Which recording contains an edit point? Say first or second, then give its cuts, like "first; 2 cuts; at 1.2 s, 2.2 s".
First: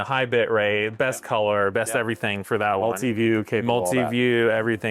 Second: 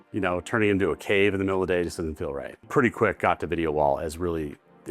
second; 1 cut; at 2.6 s